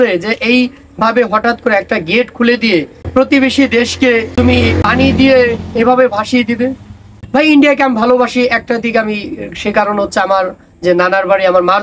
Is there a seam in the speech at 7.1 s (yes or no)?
yes